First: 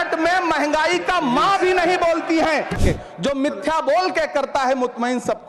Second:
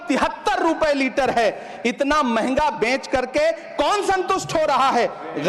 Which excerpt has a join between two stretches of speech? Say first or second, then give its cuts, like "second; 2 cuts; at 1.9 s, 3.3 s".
first; 1 cut; at 2.8 s